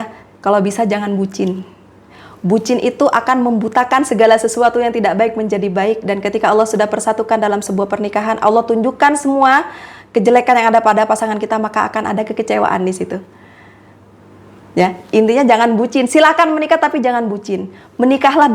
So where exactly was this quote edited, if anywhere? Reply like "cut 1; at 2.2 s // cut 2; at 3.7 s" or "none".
none